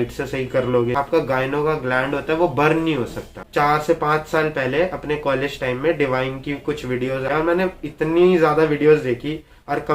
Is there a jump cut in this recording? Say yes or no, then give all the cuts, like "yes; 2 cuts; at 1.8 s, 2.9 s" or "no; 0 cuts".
yes; 3 cuts; at 0.9 s, 3.4 s, 7.2 s